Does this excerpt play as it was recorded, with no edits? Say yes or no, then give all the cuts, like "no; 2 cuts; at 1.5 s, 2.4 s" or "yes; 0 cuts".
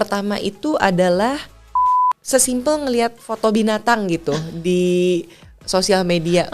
no; 1 cut; at 1.8 s